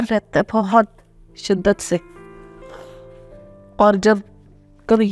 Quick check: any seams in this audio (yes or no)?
no